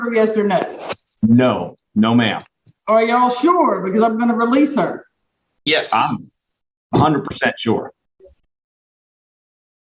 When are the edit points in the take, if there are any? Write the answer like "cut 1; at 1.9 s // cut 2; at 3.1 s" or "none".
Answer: none